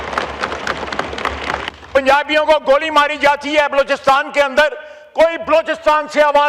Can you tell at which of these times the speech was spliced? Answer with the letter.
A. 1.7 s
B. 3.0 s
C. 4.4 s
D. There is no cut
A